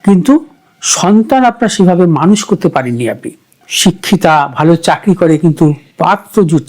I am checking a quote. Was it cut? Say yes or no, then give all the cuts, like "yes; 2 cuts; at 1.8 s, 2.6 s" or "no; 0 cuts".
yes; 1 cut; at 3.6 s